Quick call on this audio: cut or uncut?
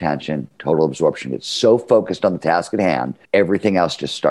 cut